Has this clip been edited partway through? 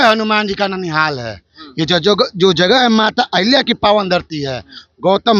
no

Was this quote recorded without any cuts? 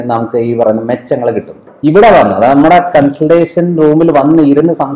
no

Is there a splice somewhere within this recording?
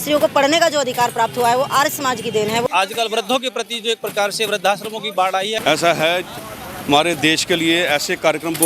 yes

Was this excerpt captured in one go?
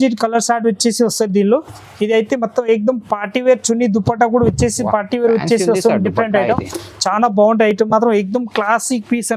yes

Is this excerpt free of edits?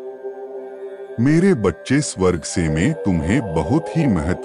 yes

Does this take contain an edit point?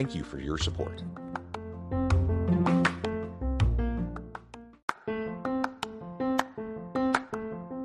yes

